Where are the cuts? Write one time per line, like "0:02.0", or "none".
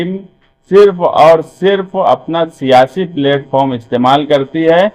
none